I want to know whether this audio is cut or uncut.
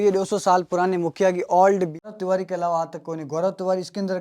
cut